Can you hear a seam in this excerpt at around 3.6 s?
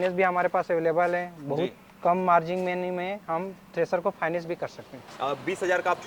no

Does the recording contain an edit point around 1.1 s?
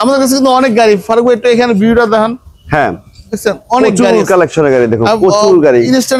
no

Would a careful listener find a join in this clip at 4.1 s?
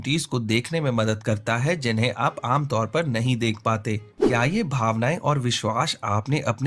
yes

